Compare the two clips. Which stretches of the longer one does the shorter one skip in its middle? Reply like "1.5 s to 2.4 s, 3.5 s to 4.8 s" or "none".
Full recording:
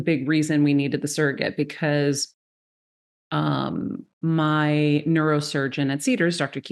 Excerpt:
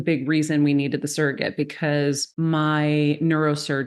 2.3 s to 4.1 s